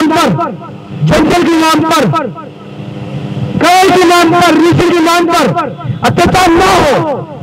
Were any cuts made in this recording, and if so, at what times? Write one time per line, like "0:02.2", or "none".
none